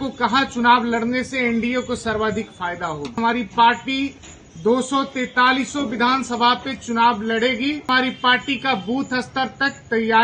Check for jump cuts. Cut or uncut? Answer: cut